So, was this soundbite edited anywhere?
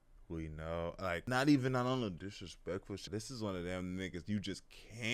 yes; 2 cuts; at 1.2 s, 3.0 s

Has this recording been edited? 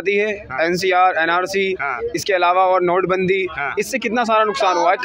no; 0 cuts

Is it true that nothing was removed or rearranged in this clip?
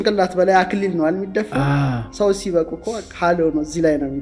yes; 0 cuts

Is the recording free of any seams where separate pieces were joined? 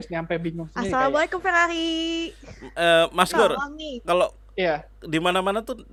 yes; 0 cuts

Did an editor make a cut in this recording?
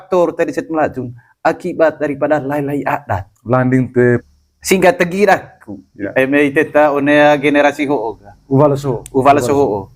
yes; 1 cut; at 4.2 s

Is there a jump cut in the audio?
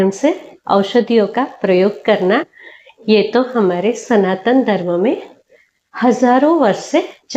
no; 0 cuts

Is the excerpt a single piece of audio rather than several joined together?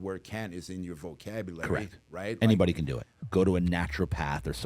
no; 1 cut; at 3.1 s

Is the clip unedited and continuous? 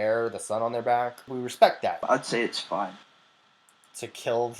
no; 2 cuts; at 1.2 s, 2.0 s

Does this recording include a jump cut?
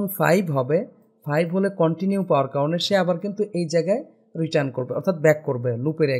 no; 0 cuts

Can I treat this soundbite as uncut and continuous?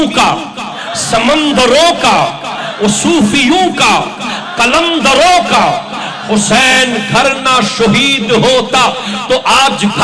yes; 0 cuts

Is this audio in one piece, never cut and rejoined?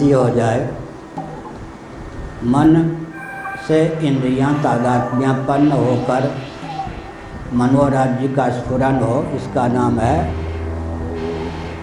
yes; 0 cuts

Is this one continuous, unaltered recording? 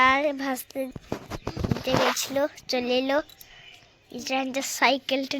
no; 1 cut; at 0.9 s

